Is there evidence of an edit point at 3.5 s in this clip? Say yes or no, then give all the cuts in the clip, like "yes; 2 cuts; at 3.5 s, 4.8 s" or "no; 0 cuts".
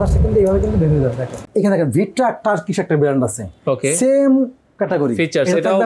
no; 1 cut; at 1.4 s